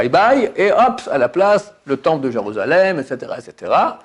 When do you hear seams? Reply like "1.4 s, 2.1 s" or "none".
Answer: none